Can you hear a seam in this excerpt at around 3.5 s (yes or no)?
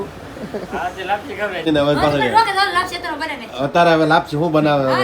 no